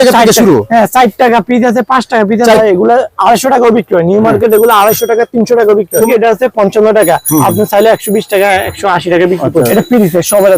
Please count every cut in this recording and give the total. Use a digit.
3